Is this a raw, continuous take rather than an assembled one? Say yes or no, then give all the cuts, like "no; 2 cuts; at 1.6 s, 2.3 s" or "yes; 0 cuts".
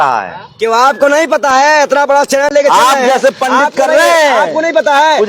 yes; 0 cuts